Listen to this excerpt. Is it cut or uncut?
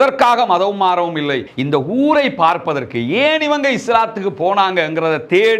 cut